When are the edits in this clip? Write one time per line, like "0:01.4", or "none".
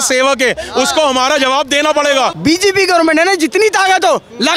0:02.3